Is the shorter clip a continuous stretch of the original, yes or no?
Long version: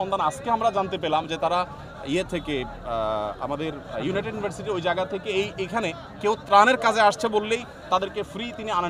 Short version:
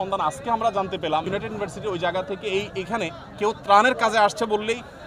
no